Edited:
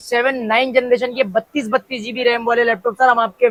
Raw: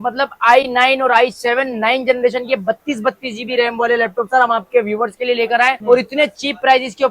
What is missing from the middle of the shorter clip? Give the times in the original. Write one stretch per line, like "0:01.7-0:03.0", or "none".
none